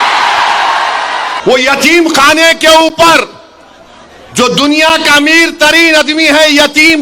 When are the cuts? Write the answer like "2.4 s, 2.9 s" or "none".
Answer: 1.3 s